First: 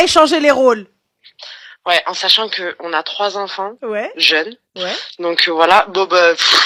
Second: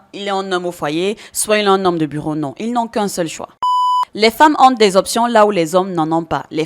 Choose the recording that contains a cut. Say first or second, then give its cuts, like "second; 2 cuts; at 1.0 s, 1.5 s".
second; 1 cut; at 3.7 s